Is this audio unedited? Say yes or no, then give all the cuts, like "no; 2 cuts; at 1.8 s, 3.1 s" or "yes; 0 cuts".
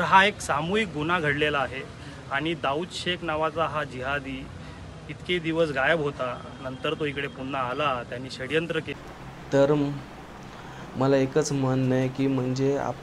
no; 1 cut; at 8.9 s